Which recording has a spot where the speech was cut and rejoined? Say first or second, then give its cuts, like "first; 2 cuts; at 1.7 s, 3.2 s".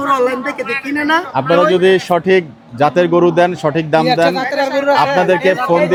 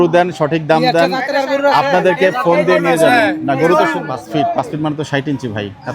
second; 1 cut; at 4.2 s